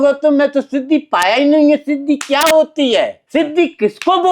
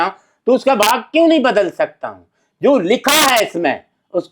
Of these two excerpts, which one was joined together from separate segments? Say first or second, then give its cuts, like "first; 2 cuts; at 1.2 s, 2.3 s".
first; 1 cut; at 3.2 s